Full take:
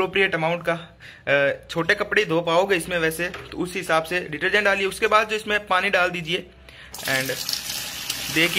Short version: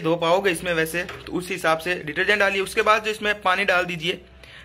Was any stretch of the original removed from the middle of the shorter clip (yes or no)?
no